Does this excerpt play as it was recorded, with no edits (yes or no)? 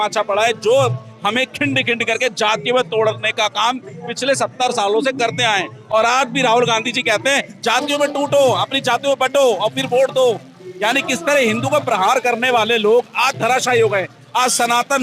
yes